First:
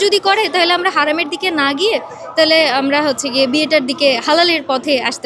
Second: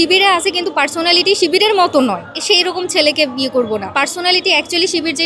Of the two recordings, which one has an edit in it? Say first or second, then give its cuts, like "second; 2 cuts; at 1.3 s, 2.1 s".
second; 2 cuts; at 2.3 s, 3.9 s